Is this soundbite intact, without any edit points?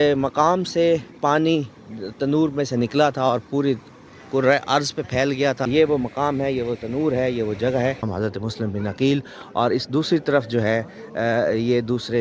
no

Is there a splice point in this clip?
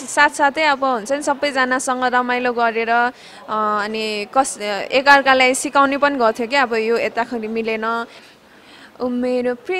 yes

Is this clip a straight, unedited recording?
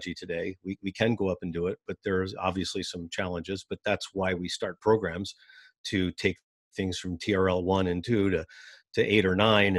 yes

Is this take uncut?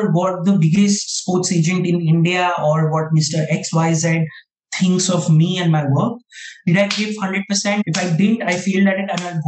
no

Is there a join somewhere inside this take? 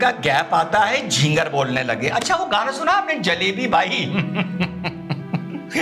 no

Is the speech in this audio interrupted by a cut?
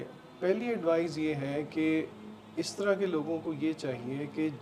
no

